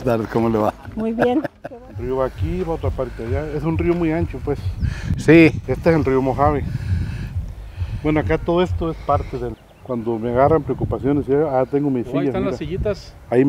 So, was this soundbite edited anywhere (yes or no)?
yes